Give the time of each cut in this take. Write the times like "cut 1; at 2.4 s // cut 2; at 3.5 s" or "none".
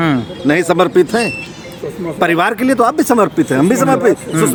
none

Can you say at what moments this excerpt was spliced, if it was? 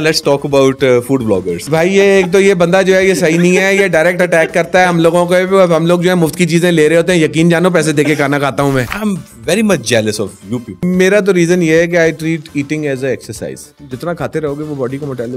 cut 1; at 1.6 s // cut 2; at 8.9 s // cut 3; at 10.8 s

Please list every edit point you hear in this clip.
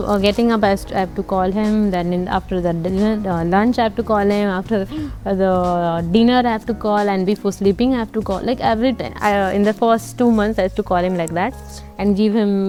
none

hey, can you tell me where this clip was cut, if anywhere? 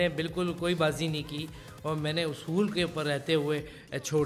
none

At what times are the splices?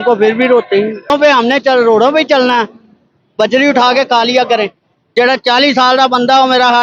cut 1; at 1.1 s // cut 2; at 4.9 s

